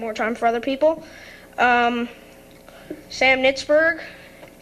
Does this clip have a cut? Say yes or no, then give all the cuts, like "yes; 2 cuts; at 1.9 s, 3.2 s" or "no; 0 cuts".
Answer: no; 0 cuts